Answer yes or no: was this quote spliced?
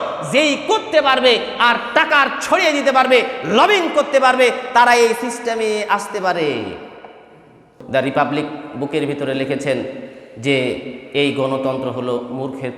yes